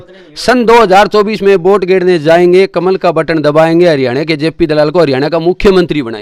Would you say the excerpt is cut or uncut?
uncut